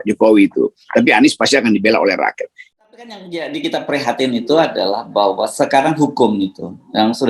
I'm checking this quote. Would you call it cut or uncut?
cut